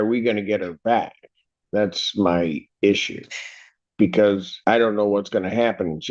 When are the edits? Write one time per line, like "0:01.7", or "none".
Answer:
0:04.5